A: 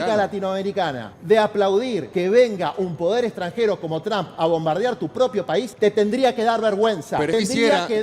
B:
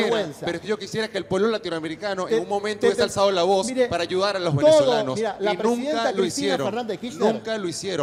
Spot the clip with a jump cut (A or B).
A